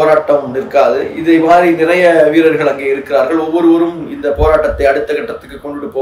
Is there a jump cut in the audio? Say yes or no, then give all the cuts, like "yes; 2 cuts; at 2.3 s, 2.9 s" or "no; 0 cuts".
no; 0 cuts